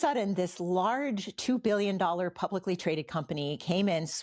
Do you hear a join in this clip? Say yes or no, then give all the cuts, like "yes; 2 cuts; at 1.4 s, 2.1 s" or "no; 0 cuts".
no; 0 cuts